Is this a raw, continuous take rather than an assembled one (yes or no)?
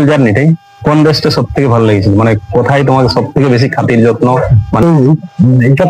no